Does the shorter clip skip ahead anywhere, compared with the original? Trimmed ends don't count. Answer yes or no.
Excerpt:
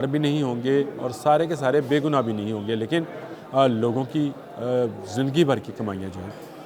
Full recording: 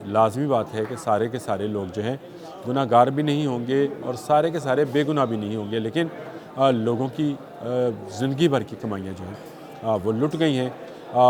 no